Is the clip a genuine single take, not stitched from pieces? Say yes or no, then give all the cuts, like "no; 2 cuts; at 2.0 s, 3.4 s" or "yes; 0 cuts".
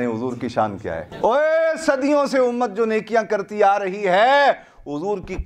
yes; 0 cuts